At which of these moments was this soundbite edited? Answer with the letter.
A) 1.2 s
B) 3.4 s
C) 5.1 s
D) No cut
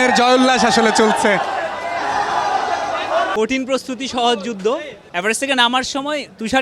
B